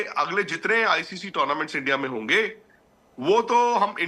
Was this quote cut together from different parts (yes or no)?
no